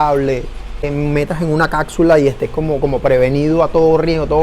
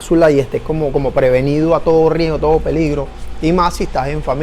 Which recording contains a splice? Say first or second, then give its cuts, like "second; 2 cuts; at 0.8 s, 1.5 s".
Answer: first; 1 cut; at 0.9 s